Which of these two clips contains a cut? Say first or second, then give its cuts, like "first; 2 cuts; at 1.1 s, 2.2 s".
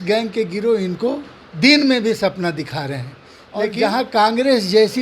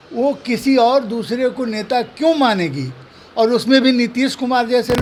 first; 1 cut; at 3.7 s